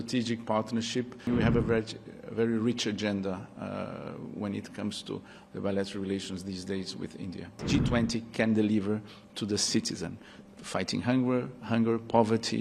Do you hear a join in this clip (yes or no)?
yes